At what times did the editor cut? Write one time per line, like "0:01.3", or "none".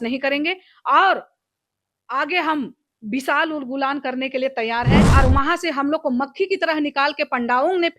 0:05.0

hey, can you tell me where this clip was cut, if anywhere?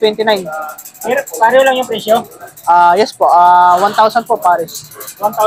none

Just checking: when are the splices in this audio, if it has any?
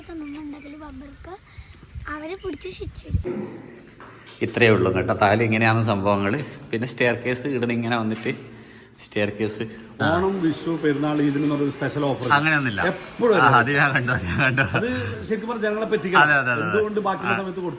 0:03.2
0:09.9

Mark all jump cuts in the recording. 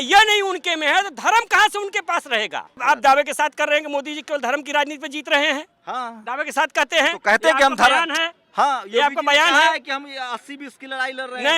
0:02.8

